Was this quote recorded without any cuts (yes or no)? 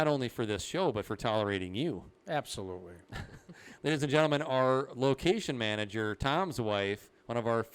yes